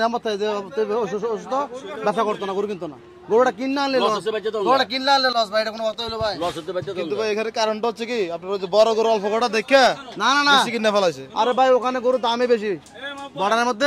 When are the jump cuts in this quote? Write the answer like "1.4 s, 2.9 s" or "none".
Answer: none